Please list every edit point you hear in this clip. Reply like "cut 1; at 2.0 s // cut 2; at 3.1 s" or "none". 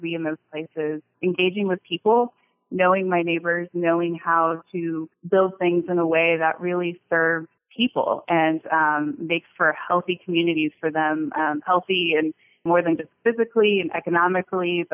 cut 1; at 1.1 s // cut 2; at 5.1 s // cut 3; at 7.6 s // cut 4; at 12.6 s